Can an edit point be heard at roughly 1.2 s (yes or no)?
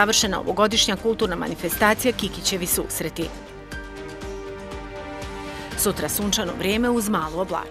no